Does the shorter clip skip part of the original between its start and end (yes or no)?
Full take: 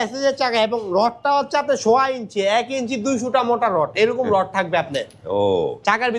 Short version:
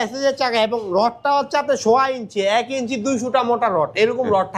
no